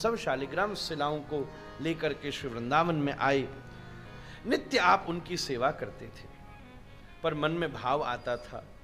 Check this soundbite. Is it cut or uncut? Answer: uncut